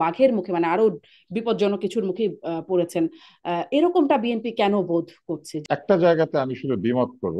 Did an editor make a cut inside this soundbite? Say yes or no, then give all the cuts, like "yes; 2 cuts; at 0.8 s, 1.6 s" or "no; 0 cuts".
yes; 1 cut; at 5.5 s